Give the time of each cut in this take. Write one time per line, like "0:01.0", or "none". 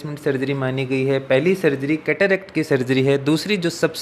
none